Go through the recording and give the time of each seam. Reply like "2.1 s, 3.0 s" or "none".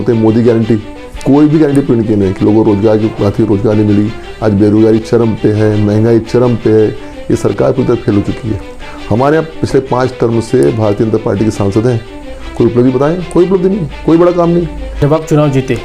14.9 s